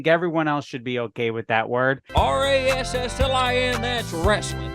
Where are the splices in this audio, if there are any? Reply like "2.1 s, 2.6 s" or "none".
2.1 s